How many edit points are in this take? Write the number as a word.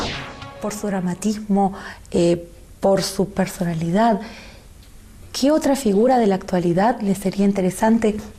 zero